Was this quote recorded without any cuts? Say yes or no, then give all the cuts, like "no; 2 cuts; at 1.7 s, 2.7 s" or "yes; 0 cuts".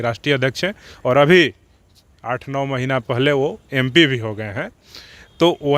yes; 0 cuts